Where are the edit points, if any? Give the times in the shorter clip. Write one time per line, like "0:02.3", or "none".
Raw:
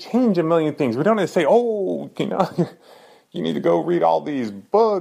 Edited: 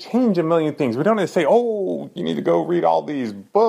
0:02.1